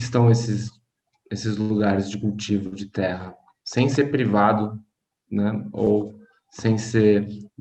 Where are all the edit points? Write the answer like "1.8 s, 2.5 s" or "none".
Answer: none